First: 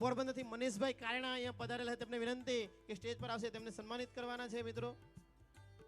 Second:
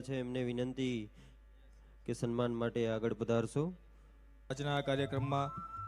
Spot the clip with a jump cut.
second; 1 cut; at 4.4 s

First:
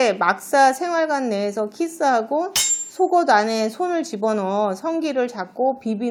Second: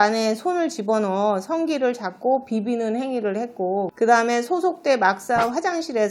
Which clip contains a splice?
second; 1 cut; at 3.9 s

